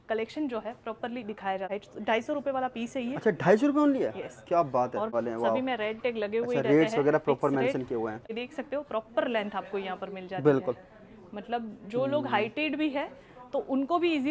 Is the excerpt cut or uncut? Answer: cut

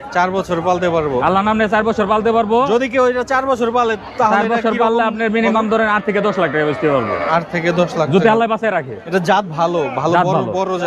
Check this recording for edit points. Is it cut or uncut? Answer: uncut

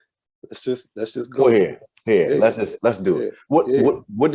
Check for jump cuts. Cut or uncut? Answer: uncut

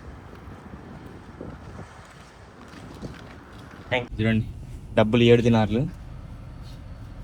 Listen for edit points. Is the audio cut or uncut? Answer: cut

